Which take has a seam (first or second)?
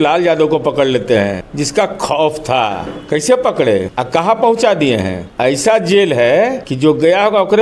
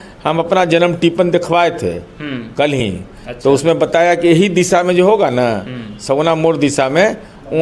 first